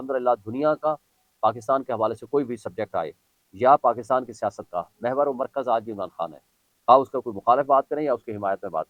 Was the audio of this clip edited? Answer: no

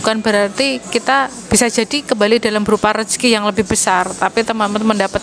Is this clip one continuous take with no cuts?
yes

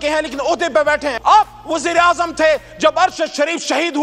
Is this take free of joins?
no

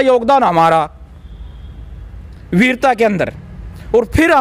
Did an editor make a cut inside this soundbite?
no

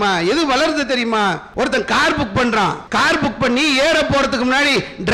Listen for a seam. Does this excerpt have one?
yes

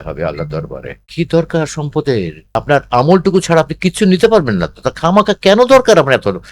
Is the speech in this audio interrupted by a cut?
yes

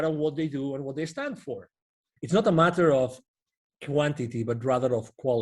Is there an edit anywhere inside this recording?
yes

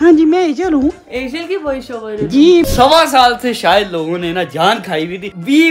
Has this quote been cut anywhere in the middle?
yes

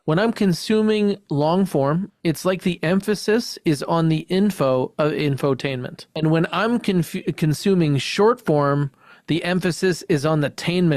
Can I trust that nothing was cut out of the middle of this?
no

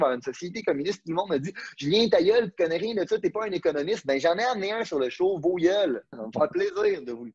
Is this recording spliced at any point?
yes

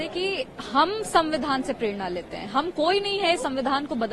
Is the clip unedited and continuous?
yes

